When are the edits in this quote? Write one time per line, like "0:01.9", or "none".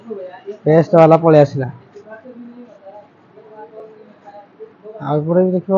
none